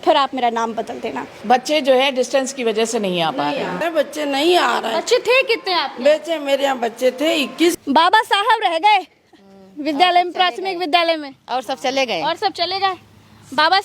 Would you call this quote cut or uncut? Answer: cut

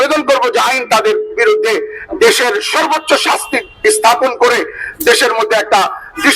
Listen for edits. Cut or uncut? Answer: uncut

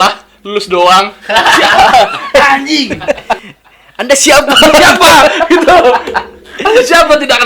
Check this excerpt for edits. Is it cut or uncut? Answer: cut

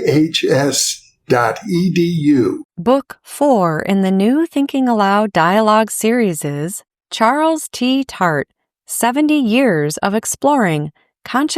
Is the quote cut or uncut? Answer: cut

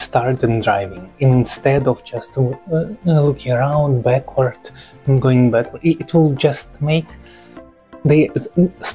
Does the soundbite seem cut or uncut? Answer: uncut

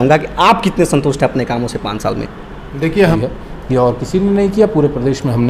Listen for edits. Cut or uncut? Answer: cut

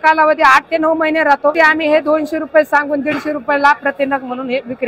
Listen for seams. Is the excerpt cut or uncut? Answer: cut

